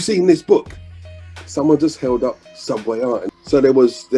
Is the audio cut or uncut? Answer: cut